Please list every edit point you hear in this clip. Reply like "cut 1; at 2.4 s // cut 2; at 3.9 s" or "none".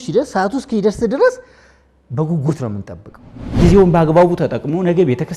cut 1; at 3.6 s